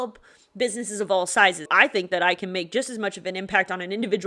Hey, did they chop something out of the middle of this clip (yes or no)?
yes